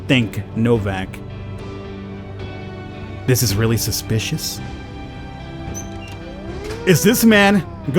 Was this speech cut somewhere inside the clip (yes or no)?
yes